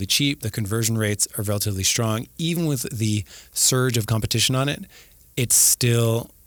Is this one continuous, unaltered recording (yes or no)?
yes